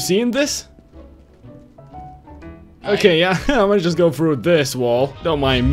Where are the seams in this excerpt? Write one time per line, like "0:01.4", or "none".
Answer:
none